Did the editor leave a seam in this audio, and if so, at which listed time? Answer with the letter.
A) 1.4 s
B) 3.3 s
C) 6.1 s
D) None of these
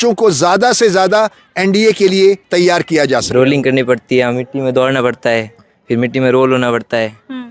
B